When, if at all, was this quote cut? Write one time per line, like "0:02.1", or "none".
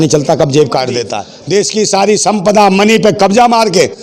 0:01.1